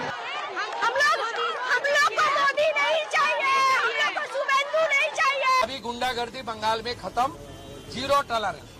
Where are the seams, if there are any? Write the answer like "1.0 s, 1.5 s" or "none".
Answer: 5.6 s